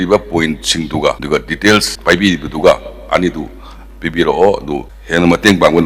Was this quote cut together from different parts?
no; 0 cuts

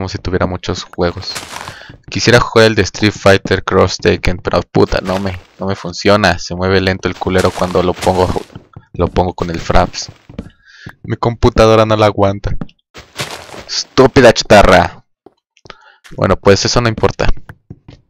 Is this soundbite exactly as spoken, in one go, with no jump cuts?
no; 1 cut; at 5.3 s

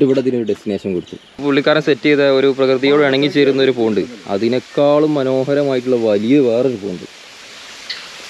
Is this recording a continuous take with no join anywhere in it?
no; 1 cut; at 1.3 s

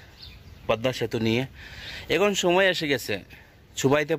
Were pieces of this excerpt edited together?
no; 0 cuts

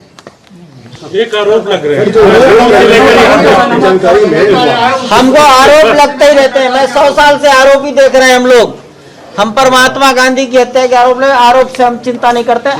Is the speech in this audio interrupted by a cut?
no; 0 cuts

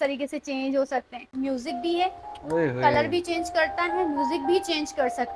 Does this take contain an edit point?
yes; 1 cut; at 1.3 s

